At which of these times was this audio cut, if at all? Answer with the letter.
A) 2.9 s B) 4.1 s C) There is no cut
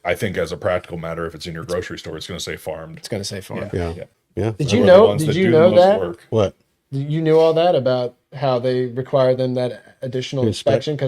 B